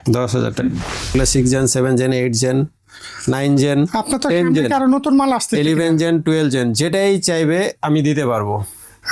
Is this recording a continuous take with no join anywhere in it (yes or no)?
no